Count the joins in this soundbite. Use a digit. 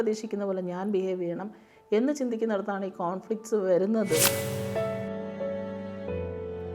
1